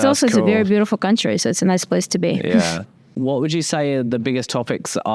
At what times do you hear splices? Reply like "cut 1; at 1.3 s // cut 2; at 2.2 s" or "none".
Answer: none